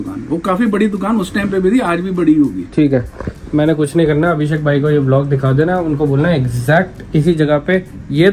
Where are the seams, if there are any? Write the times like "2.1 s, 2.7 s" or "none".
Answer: none

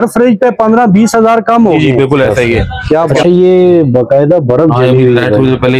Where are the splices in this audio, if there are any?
3.2 s

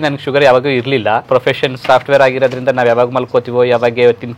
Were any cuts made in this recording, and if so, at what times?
1.3 s

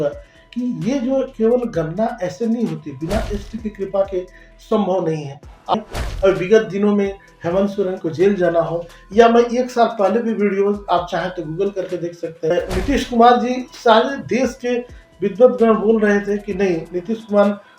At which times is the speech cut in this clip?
5.7 s, 12.5 s

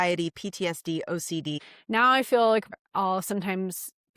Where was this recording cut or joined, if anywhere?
1.6 s, 2.7 s

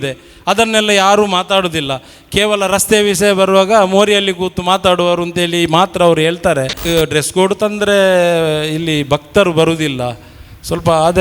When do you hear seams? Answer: 6.8 s

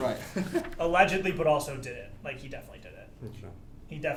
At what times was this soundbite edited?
none

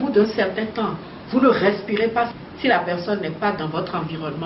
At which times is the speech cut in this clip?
2.3 s

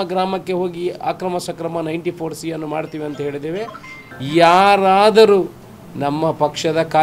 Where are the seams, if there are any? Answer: 3.9 s

